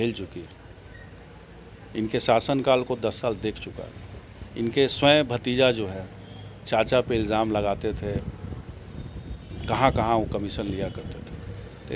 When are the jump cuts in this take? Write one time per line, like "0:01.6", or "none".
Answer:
none